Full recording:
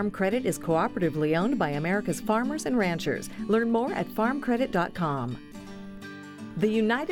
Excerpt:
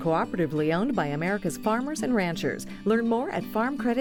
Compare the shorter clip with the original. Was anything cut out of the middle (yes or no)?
no